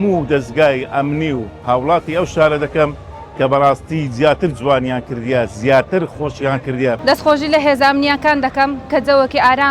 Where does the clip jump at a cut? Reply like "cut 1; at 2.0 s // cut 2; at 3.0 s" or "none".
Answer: cut 1; at 7.0 s

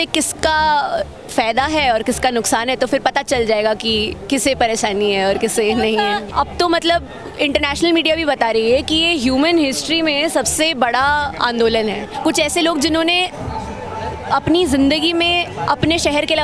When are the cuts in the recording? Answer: cut 1; at 6.3 s // cut 2; at 12.1 s

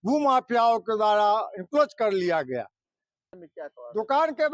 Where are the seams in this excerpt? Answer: cut 1; at 3.3 s

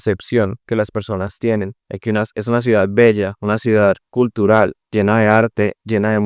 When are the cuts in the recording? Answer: cut 1; at 3.3 s // cut 2; at 4.8 s

